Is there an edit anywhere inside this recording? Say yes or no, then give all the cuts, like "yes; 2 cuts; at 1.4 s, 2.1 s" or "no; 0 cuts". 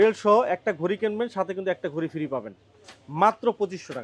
no; 0 cuts